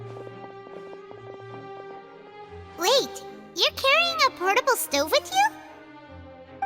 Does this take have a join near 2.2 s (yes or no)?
yes